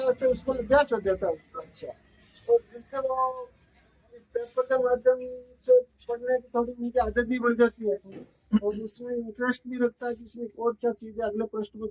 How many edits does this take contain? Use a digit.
0